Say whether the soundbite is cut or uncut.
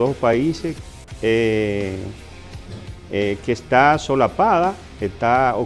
uncut